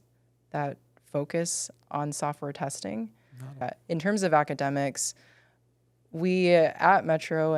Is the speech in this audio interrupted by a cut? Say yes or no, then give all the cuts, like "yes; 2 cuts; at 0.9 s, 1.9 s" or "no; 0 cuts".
yes; 1 cut; at 3.6 s